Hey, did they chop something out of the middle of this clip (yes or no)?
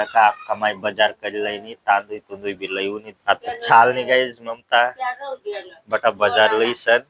yes